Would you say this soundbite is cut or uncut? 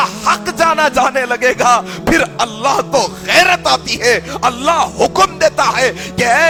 uncut